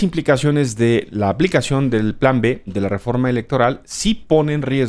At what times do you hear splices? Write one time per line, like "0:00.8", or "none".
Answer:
none